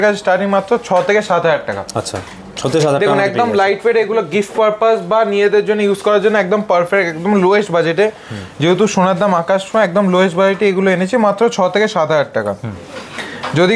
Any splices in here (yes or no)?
no